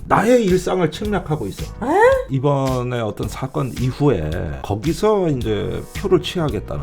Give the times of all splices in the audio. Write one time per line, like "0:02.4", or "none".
0:02.3
0:04.6